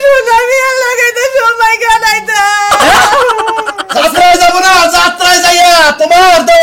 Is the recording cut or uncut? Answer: cut